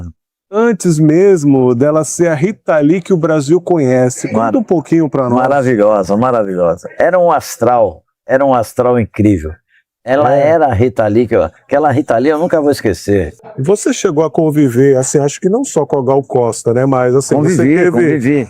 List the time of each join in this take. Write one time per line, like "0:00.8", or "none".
0:13.4